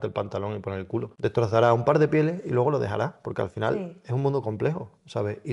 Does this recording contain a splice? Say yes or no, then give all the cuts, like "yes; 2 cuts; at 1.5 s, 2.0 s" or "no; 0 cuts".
yes; 1 cut; at 1.1 s